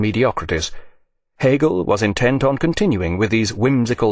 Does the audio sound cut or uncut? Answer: cut